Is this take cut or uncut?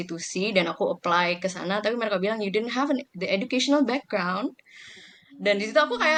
uncut